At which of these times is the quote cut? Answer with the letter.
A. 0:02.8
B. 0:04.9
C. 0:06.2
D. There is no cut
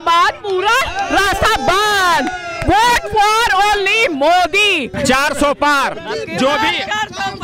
B